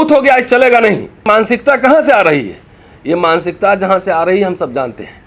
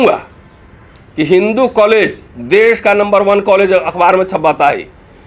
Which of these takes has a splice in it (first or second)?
first